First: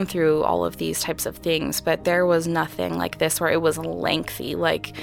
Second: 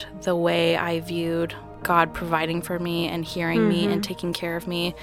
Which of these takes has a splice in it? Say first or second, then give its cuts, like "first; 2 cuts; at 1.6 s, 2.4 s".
second; 1 cut; at 1.7 s